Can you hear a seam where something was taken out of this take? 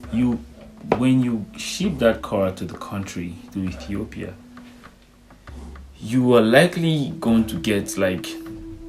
no; 0 cuts

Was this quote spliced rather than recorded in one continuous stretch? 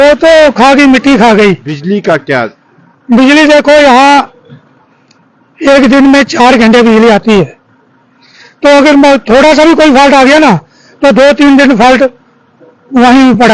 yes; 1 cut; at 1.7 s

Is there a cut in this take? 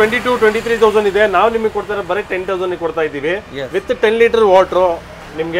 no; 0 cuts

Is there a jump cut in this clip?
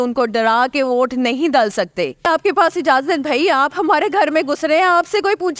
yes; 1 cut; at 2.3 s

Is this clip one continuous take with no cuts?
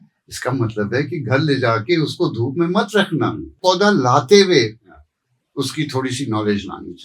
no; 1 cut; at 3.6 s

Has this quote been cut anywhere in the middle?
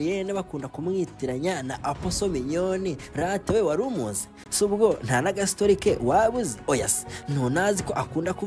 no; 0 cuts

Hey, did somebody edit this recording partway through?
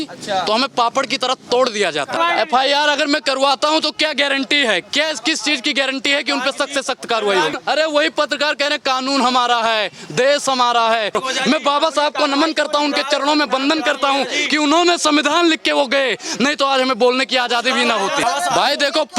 yes; 4 cuts; at 2.2 s, 7.5 s, 11.2 s, 18.2 s

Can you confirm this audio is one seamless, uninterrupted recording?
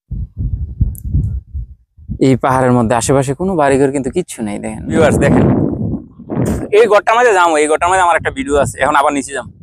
no; 1 cut; at 4.9 s

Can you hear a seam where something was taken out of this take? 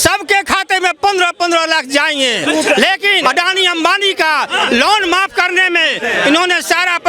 yes; 1 cut; at 3.2 s

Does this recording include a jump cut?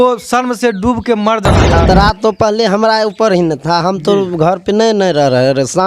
yes; 1 cut; at 1.6 s

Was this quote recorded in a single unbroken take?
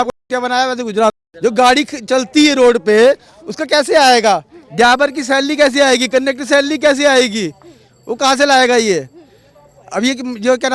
no; 1 cut; at 1.3 s

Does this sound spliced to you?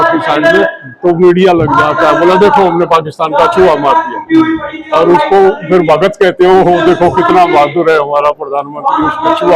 no; 0 cuts

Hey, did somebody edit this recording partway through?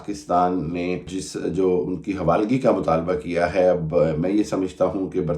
yes; 1 cut; at 1.2 s

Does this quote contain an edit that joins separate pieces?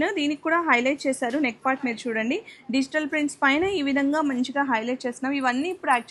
no; 0 cuts

